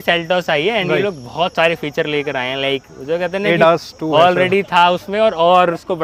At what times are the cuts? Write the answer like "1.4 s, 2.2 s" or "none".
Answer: none

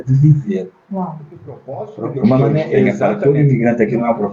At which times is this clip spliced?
2.9 s

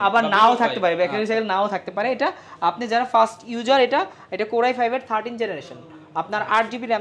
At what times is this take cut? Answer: none

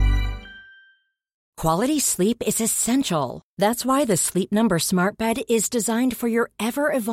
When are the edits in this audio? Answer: 1.4 s

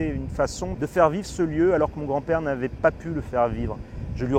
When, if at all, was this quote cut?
none

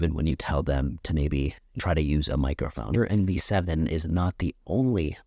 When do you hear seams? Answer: 1.6 s, 2.9 s

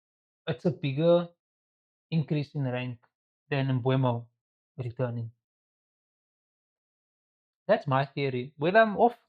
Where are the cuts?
none

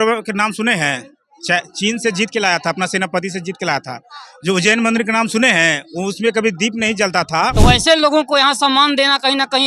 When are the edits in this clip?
7.5 s

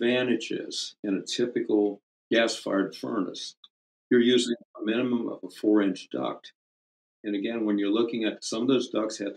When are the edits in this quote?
2.1 s

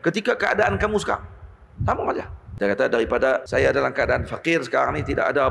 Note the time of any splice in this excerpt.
2.4 s, 3.4 s

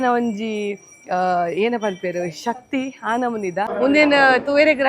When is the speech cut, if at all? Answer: 3.7 s

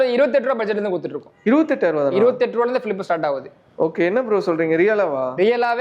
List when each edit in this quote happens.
none

